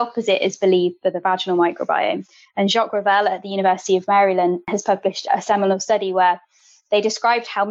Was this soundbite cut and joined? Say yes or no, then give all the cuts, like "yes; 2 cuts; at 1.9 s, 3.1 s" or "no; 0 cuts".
yes; 1 cut; at 4.7 s